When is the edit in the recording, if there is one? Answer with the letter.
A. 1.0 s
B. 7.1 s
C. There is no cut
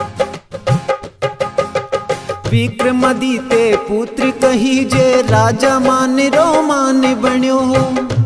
A